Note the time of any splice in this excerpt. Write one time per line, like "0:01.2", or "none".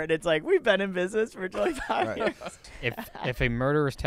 0:02.6